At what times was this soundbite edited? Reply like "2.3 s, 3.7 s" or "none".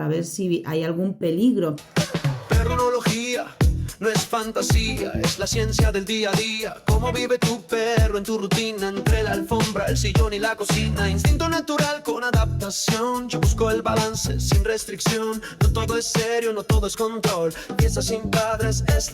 1.9 s